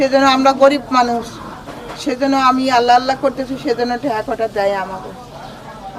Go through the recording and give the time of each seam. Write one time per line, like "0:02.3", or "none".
none